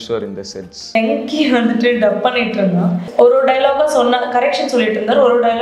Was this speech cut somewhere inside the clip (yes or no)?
yes